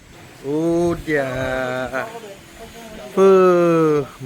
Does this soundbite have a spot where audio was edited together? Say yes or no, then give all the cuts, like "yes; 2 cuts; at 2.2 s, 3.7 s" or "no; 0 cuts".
no; 0 cuts